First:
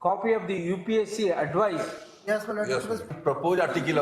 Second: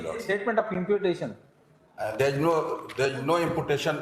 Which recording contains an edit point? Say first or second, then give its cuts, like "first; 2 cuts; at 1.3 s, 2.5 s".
first; 1 cut; at 3.1 s